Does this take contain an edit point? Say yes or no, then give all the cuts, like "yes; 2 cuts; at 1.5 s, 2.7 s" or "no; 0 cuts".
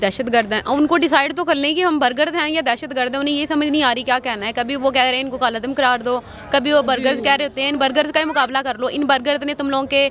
no; 0 cuts